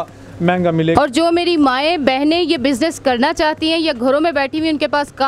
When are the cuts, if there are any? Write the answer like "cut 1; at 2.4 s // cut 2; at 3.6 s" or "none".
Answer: cut 1; at 0.9 s